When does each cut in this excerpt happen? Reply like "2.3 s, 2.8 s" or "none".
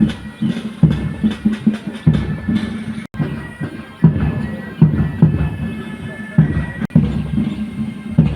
3.0 s

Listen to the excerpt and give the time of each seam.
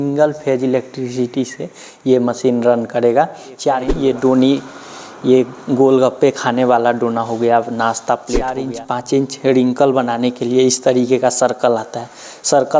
3.9 s, 8.6 s

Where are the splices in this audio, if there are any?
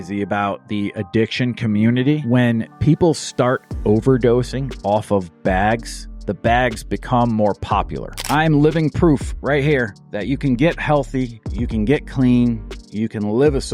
2.2 s, 8.2 s

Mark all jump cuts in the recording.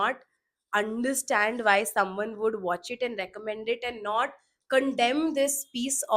none

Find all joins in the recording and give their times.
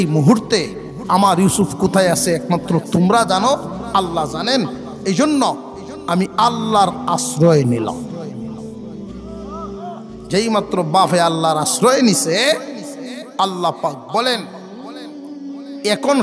8.1 s, 9.6 s

